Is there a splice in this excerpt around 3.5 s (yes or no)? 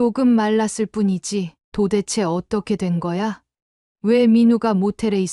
no